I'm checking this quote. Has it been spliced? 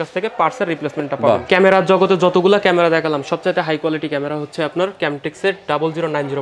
yes; 1 cut; at 1.4 s

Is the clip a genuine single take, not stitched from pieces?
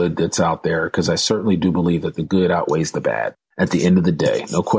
yes; 0 cuts

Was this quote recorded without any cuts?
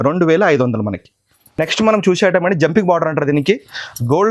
yes; 0 cuts

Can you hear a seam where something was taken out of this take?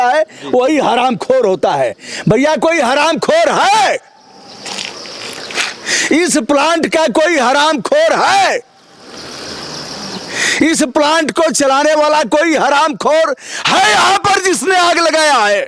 no; 0 cuts

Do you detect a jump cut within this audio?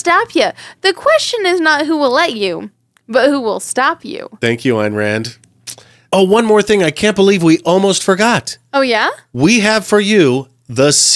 no; 0 cuts

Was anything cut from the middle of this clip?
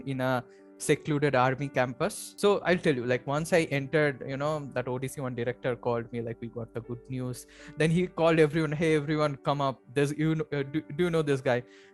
yes; 1 cut; at 2.2 s

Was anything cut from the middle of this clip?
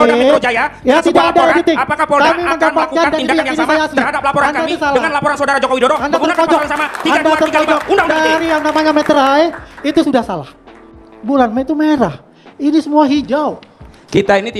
no; 0 cuts

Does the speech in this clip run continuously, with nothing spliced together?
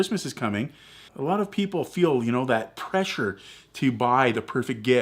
no; 1 cut; at 1.1 s

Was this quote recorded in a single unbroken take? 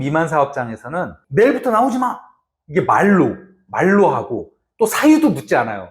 no; 1 cut; at 1.2 s

